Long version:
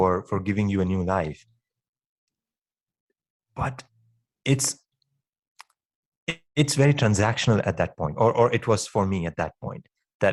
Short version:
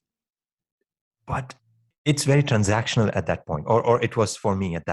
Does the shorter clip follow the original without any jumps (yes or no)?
no